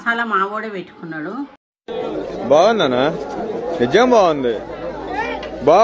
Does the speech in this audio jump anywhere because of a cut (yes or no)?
no